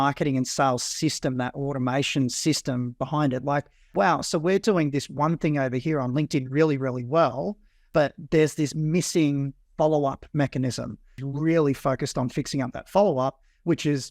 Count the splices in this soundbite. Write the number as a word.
two